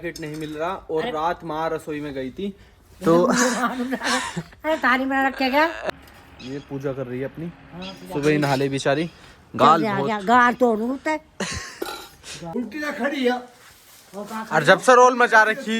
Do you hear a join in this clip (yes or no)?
yes